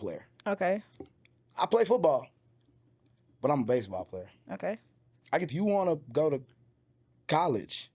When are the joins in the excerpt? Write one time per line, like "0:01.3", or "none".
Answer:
0:05.5